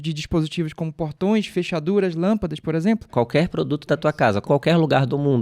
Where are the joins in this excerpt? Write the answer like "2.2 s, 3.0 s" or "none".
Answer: 3.1 s, 4.4 s